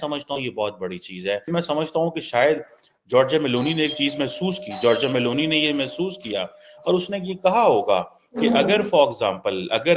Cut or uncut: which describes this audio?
cut